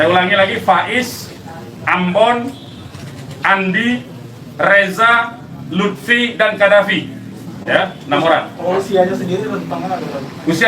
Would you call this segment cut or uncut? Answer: uncut